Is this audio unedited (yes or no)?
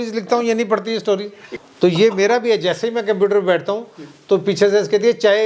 no